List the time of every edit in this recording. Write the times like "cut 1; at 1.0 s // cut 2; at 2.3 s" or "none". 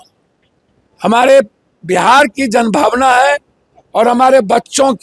none